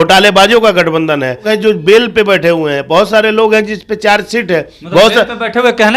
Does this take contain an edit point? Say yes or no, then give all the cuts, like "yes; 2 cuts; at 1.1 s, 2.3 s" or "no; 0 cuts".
yes; 1 cut; at 1.5 s